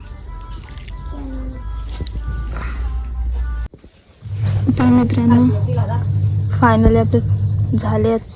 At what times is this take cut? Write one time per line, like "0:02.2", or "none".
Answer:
0:03.7

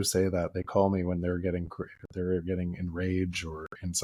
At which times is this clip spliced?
none

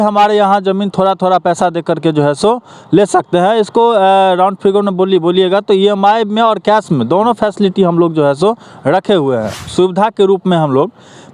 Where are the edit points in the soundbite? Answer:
0:09.7

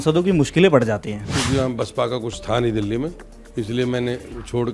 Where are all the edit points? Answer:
0:01.3

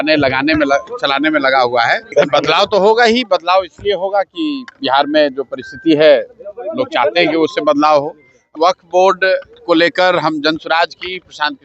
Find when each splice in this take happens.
0:02.0
0:08.4

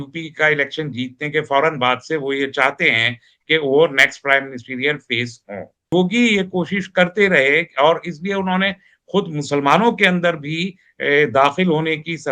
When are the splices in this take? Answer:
0:05.9

